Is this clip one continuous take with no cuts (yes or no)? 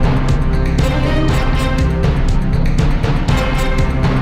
yes